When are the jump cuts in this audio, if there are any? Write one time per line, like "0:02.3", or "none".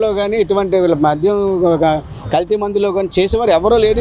none